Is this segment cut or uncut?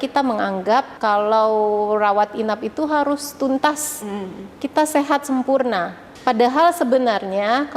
cut